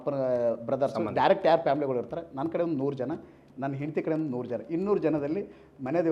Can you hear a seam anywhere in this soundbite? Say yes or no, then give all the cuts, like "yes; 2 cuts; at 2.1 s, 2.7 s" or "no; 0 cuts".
no; 0 cuts